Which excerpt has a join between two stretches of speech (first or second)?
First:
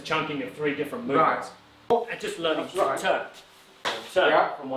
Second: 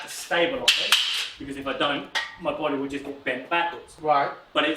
first